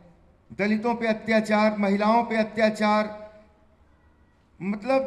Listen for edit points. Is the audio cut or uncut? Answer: uncut